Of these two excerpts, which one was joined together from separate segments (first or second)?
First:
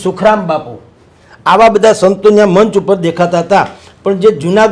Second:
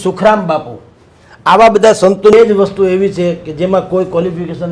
second